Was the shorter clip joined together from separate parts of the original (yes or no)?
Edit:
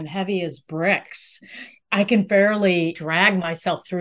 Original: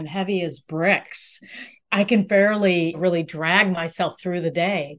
yes